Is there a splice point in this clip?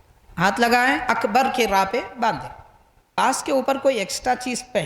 yes; 1 cut; at 3.2 s

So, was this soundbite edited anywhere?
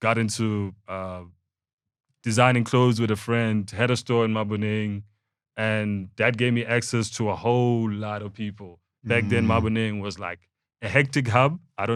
no; 0 cuts

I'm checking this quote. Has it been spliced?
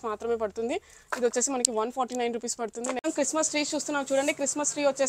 yes; 1 cut; at 3.0 s

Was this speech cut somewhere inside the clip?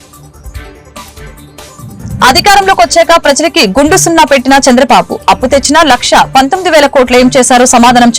no; 0 cuts

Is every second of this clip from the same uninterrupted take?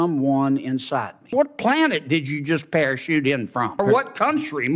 no; 2 cuts; at 1.3 s, 3.8 s

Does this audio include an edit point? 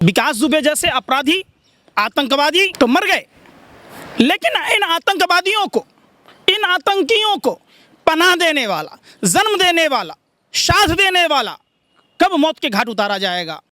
yes; 1 cut; at 2.7 s

